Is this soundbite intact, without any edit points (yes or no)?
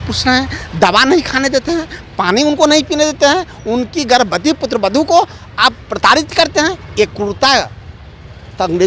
yes